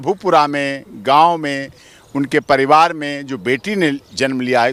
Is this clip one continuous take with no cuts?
yes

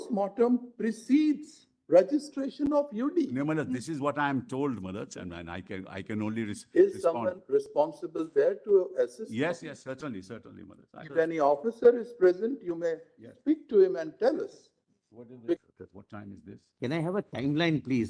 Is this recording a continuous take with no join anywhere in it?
no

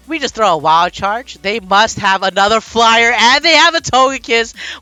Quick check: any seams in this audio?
no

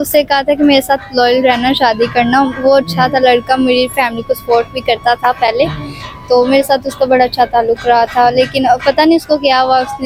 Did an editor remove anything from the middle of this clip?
no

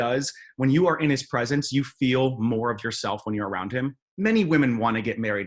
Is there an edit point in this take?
yes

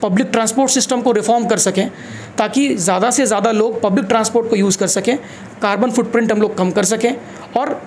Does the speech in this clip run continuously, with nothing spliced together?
yes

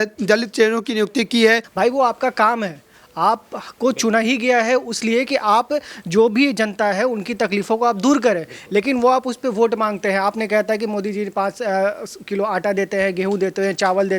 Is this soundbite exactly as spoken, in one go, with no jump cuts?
no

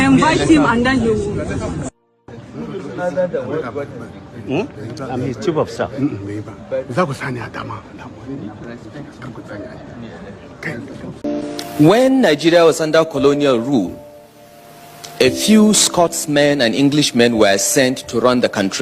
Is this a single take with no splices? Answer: no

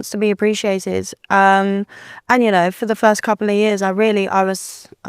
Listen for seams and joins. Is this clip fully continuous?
yes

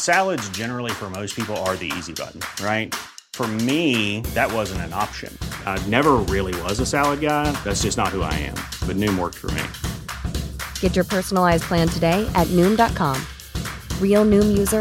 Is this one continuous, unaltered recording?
yes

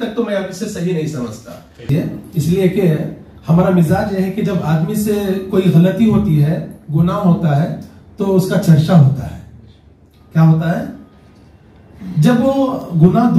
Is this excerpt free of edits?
yes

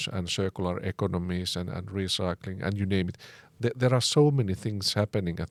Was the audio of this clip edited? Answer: no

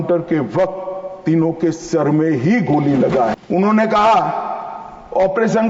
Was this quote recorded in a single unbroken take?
no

